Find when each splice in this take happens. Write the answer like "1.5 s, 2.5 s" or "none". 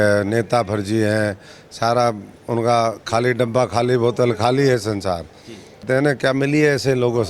5.8 s